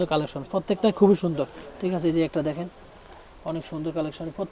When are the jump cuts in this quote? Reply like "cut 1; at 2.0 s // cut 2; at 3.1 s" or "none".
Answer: none